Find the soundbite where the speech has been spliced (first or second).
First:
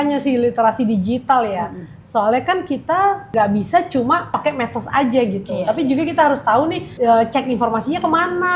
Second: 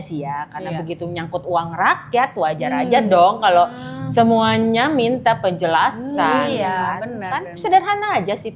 first